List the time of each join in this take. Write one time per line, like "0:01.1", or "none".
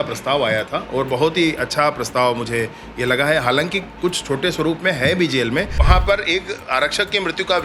0:05.8